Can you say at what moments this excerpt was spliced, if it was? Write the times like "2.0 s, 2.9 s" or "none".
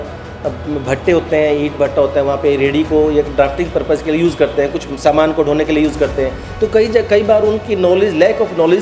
none